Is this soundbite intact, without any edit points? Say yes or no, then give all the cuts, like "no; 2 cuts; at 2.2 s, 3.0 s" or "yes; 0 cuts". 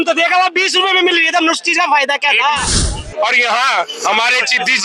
no; 1 cut; at 3.0 s